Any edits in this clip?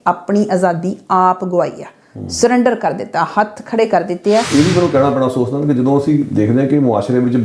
yes; 1 cut; at 4.5 s

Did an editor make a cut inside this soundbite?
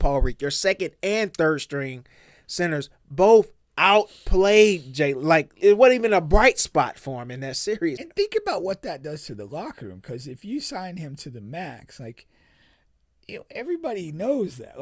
yes; 2 cuts; at 5.5 s, 8.0 s

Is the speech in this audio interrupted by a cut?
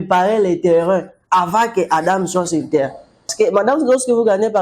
yes; 1 cut; at 3.3 s

